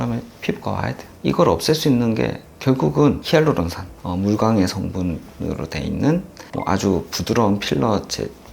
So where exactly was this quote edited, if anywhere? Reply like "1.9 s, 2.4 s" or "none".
none